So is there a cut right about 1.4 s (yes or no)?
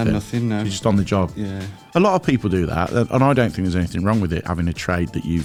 no